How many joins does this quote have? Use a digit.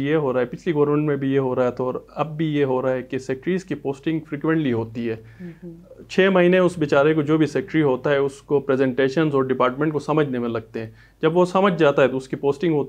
0